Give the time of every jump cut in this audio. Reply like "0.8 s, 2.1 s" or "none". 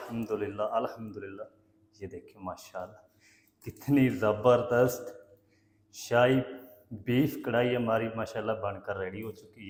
none